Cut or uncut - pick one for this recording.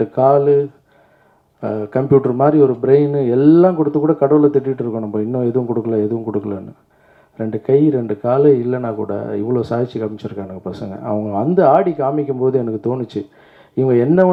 uncut